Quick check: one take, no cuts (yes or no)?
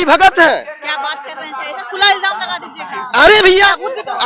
yes